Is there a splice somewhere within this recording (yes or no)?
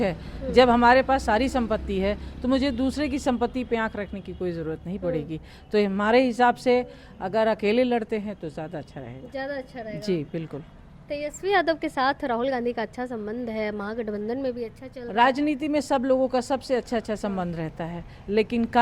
no